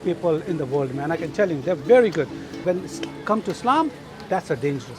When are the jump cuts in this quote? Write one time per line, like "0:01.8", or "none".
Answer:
0:02.6

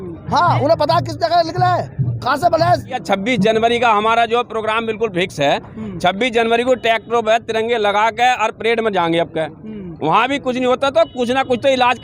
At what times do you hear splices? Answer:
0:03.0

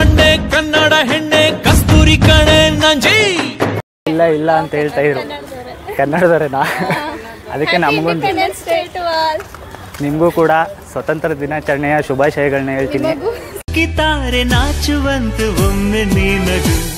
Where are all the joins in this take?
none

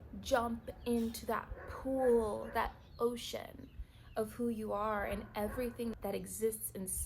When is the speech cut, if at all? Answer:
0:05.9

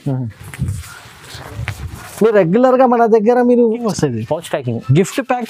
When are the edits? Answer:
0:03.8

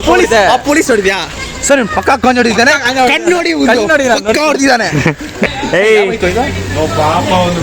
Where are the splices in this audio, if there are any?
0:05.5

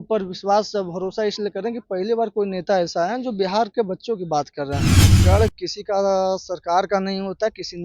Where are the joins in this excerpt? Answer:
0:05.1

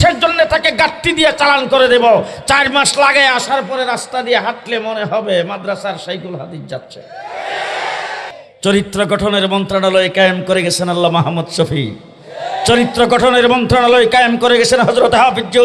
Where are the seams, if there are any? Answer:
0:08.3

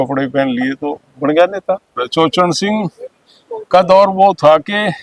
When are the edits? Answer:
0:02.0

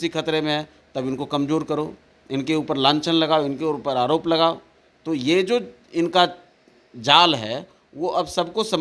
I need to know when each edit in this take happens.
none

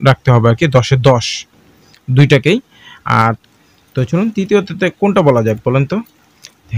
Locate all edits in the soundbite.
0:03.2

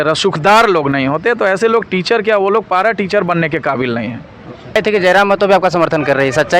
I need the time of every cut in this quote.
0:04.8

